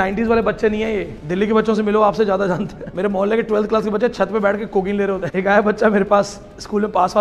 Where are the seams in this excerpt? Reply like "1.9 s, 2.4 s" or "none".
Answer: 1.2 s, 2.8 s, 5.3 s